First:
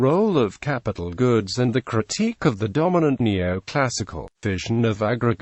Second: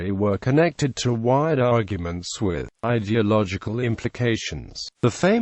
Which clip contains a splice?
first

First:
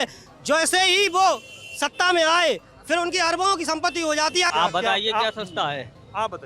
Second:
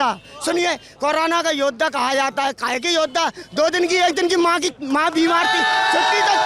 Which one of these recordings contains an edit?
first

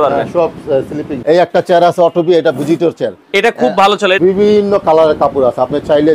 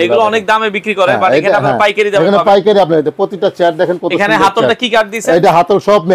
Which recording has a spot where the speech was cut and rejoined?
first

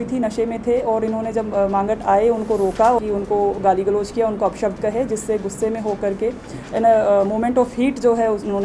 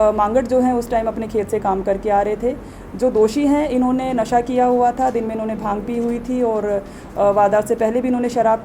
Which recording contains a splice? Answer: first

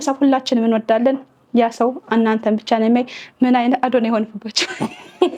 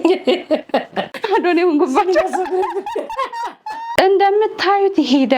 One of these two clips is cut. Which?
second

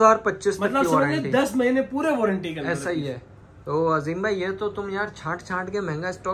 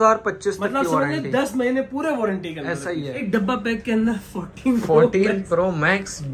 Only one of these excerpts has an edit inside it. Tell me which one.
second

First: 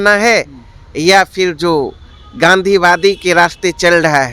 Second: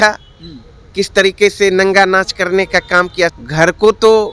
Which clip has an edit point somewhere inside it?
second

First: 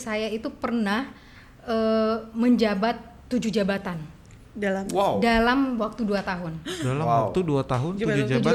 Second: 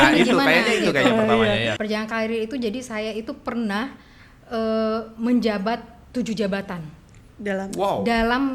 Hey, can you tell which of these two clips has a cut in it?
second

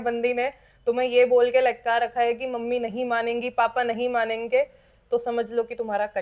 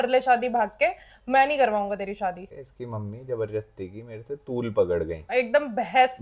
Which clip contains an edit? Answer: second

